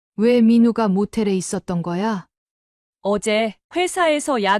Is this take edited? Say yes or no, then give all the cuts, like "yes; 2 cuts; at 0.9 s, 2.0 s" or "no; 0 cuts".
yes; 1 cut; at 2.3 s